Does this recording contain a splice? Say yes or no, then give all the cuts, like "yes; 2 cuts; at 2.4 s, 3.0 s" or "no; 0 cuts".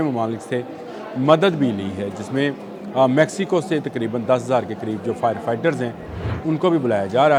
no; 0 cuts